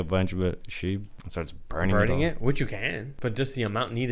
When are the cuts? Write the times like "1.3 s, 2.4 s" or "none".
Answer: 1.2 s, 3.1 s